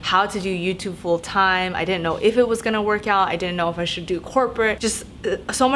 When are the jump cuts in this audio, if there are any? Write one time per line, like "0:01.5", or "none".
0:04.8